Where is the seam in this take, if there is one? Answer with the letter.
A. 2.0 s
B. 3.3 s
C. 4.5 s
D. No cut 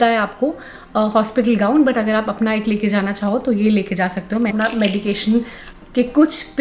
C